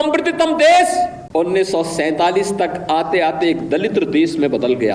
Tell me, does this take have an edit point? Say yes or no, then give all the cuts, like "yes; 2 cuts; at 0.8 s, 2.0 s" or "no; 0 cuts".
yes; 1 cut; at 1.2 s